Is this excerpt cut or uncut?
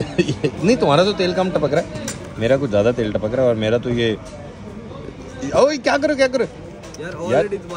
uncut